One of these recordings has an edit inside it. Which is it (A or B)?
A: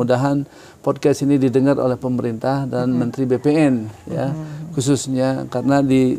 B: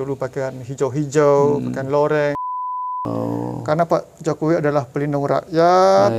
B